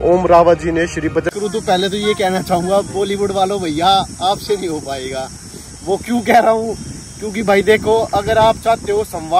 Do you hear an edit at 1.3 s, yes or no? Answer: yes